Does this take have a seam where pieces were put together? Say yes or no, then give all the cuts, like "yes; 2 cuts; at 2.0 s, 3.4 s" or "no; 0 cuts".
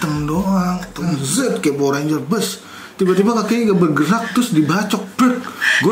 yes; 1 cut; at 1.1 s